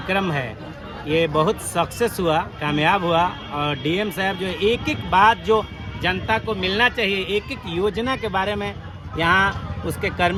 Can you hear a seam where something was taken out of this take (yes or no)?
no